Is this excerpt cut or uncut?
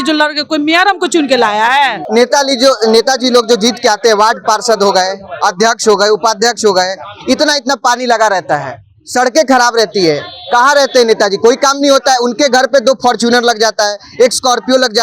cut